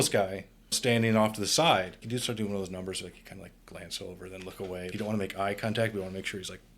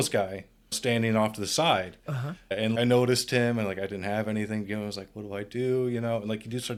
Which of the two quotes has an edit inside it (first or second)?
first